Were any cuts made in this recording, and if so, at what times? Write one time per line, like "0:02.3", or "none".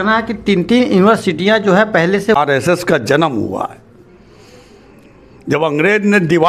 0:02.3